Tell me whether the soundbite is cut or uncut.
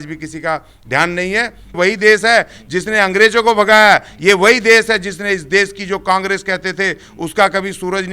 cut